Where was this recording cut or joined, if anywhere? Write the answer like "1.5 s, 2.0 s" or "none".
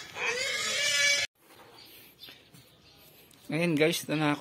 1.2 s